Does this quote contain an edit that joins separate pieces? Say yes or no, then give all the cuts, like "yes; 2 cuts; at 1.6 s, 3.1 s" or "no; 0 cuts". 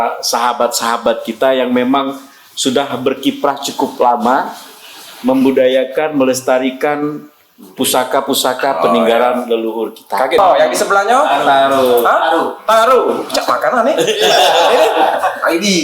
yes; 1 cut; at 10.4 s